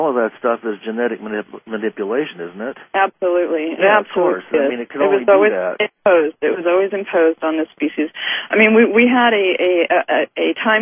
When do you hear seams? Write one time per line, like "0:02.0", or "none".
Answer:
0:03.1